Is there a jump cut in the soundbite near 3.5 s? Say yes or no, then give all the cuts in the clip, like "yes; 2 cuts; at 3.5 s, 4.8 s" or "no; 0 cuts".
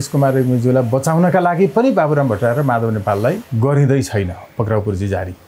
yes; 1 cut; at 3.5 s